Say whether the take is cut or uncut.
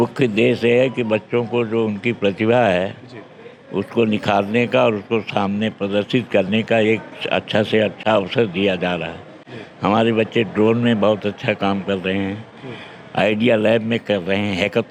uncut